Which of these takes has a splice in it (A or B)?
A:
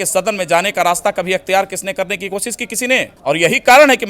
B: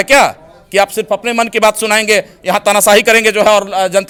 A